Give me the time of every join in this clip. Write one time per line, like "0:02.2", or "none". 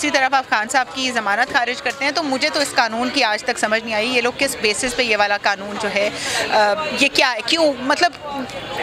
none

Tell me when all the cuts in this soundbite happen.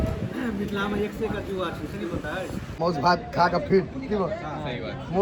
0:02.6

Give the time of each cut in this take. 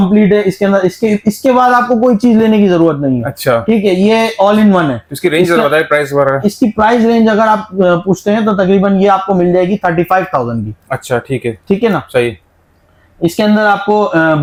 none

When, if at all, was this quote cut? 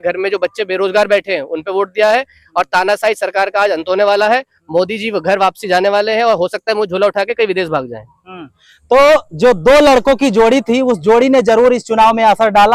none

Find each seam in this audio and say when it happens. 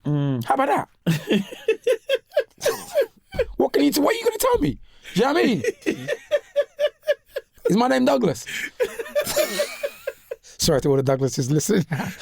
0:00.9
0:05.8
0:07.5

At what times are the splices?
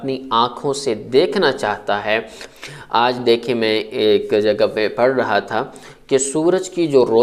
0:02.5

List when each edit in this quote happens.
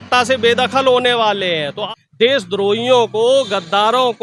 0:01.8

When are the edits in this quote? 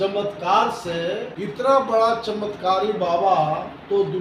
0:01.3

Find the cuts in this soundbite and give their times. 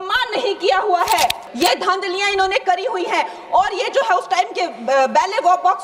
0:01.4

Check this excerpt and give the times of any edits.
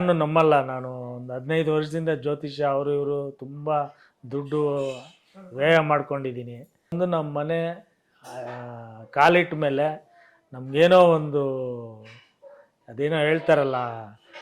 0:06.9

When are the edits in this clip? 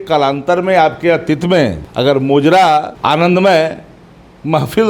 0:01.8
0:02.9

